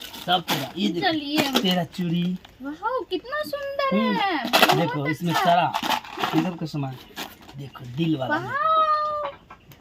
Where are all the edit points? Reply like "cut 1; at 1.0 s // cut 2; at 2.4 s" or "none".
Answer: none

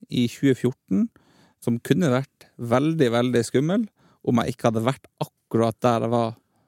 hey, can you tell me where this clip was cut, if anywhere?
cut 1; at 1.6 s

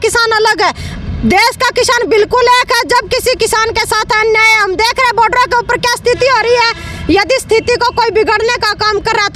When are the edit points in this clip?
none

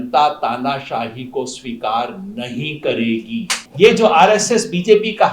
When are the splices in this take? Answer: cut 1; at 3.6 s

